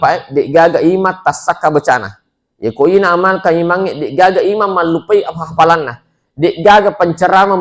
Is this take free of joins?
yes; 0 cuts

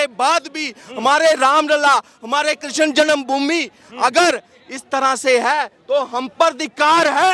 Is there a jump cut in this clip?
no; 0 cuts

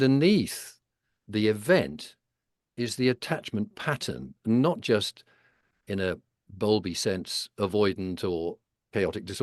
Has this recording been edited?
no; 0 cuts

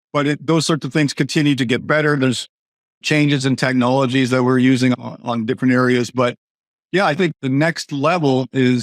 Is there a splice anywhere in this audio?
yes; 1 cut; at 5.0 s

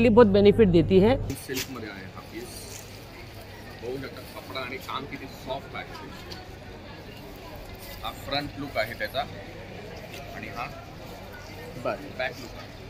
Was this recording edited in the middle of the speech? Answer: yes; 1 cut; at 1.4 s

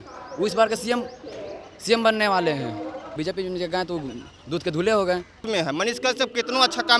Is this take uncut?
no; 2 cuts; at 3.1 s, 5.4 s

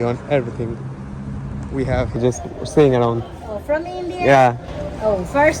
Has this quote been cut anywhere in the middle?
yes; 1 cut; at 2.2 s

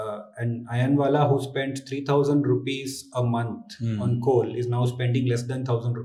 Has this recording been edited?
no; 0 cuts

